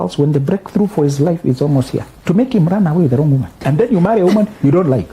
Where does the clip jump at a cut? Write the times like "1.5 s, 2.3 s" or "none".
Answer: 2.1 s, 3.6 s